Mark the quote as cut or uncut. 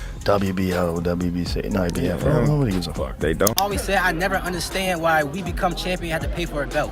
cut